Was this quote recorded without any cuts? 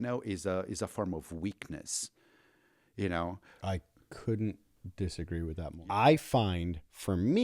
no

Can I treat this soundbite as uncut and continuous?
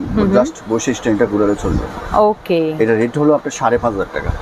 yes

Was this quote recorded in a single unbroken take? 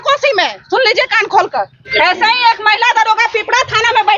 no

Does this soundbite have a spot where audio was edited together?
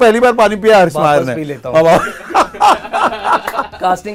no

